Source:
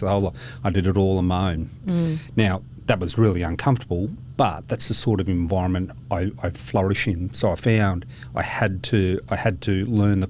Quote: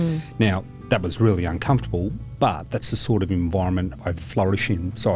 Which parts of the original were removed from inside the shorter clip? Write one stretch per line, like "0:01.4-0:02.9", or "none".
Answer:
0:06.0-0:06.4